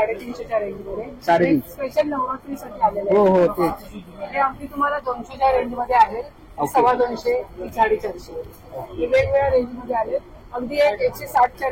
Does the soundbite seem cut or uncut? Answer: uncut